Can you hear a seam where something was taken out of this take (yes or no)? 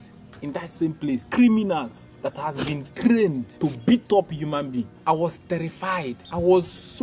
yes